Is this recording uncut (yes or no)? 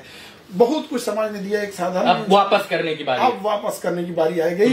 yes